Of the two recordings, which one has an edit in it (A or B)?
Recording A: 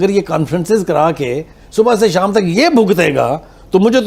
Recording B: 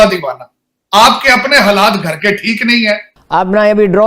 B